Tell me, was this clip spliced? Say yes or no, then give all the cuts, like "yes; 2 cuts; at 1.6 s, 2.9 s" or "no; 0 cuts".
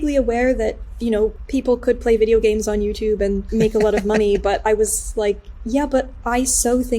yes; 2 cuts; at 1.4 s, 3.4 s